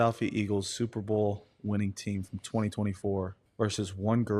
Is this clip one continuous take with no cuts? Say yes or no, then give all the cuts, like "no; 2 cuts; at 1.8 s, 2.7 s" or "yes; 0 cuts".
no; 1 cut; at 3.4 s